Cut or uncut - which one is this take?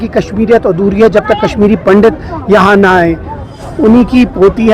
cut